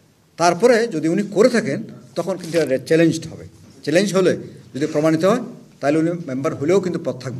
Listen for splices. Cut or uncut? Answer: uncut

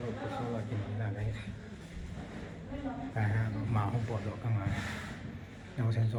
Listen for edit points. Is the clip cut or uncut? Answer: uncut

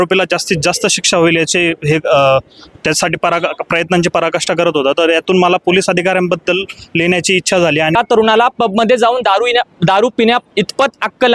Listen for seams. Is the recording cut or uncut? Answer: cut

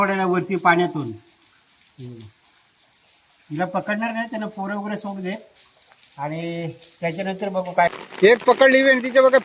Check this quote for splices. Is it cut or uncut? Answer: cut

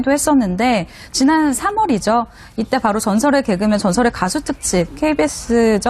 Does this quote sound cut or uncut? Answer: cut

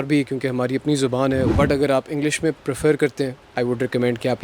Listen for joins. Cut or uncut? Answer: cut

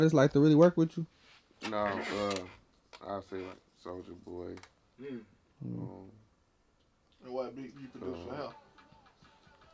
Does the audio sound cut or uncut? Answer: uncut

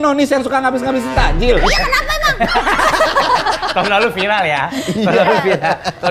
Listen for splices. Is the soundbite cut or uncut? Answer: uncut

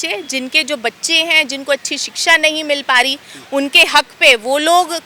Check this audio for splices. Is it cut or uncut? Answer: uncut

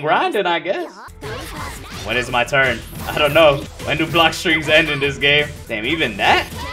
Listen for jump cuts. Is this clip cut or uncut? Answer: cut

